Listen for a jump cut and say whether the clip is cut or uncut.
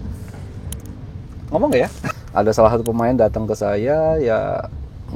cut